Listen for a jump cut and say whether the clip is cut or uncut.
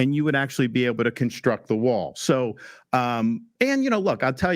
cut